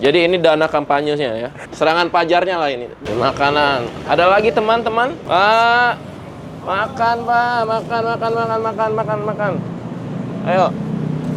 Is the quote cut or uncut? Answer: uncut